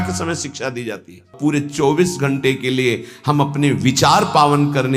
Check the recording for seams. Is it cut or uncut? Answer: cut